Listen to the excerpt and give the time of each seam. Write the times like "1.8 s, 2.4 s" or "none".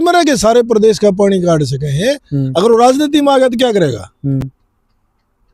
none